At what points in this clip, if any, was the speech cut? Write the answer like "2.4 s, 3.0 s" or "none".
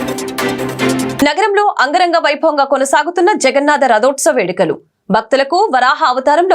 1.1 s

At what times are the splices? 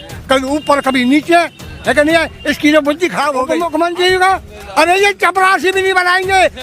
3.4 s

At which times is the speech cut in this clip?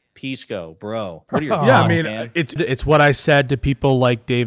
1.2 s, 2.6 s

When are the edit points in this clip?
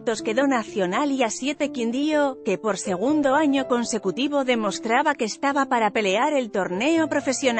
none

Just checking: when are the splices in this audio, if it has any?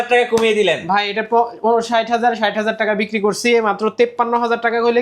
none

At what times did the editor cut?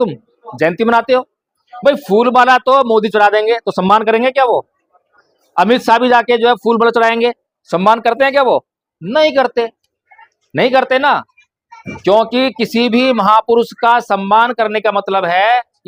none

